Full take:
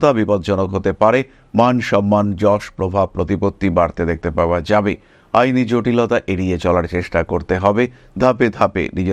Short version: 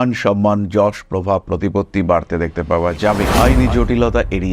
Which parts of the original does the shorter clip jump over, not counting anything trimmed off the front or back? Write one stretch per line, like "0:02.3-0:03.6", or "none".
0:05.0-0:05.3